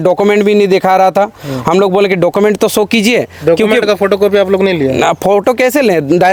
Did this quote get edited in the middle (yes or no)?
no